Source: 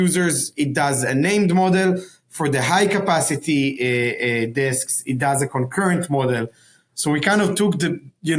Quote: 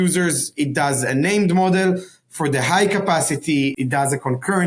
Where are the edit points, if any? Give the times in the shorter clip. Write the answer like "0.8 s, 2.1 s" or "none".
3.7 s